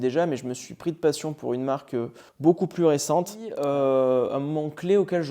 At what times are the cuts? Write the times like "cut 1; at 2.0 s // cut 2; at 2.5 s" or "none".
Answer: cut 1; at 3.5 s